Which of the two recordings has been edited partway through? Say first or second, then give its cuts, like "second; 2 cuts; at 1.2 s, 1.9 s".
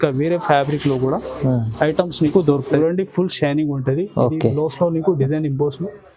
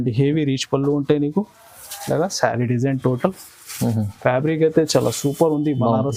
first; 1 cut; at 2.8 s